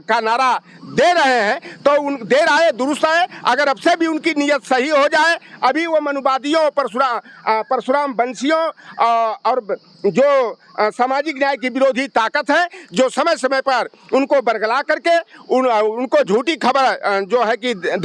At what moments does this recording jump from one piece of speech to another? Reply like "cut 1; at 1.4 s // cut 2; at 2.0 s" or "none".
none